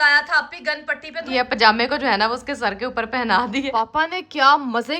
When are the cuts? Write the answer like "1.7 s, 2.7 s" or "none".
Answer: 1.3 s, 3.7 s

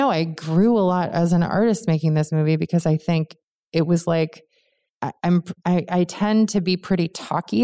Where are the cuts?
none

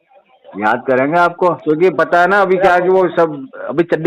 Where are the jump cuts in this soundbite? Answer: 1.6 s

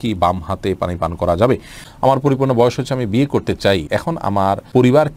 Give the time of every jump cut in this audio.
1.8 s, 4.3 s

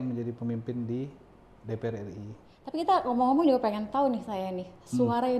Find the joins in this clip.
2.5 s

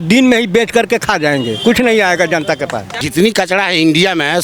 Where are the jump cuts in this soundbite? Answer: 2.9 s

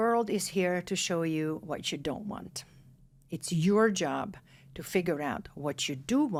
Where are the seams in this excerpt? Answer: none

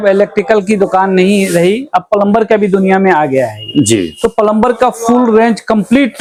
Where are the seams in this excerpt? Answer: none

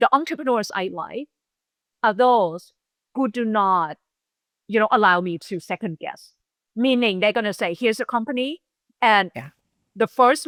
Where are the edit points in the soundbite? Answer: none

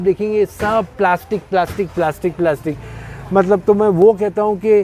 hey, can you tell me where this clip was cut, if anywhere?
none

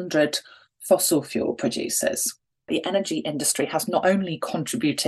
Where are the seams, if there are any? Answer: 2.7 s

